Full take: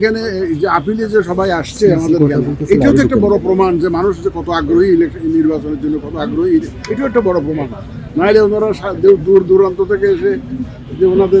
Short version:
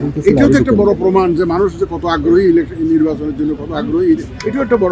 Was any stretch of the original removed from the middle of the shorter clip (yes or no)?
no